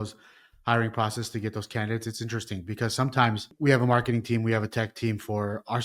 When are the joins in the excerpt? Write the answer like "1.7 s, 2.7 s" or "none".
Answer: 3.5 s